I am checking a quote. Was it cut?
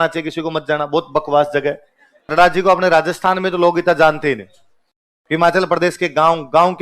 yes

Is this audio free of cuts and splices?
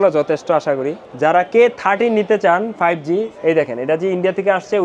no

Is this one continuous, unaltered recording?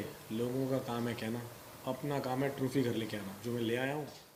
yes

